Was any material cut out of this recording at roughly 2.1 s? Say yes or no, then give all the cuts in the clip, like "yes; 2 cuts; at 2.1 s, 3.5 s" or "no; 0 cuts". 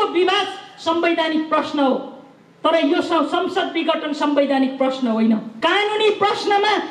no; 1 cut; at 5.5 s